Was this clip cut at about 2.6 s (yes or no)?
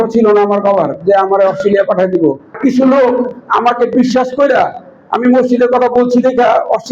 yes